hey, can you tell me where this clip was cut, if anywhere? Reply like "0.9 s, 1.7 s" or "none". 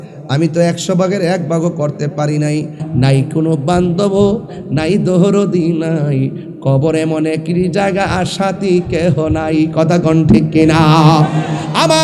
2.8 s